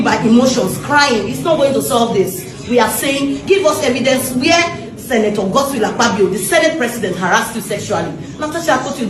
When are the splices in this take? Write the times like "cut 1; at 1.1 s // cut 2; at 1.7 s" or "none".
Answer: cut 1; at 2.5 s